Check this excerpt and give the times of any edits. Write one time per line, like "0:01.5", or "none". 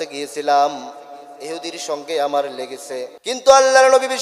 0:03.1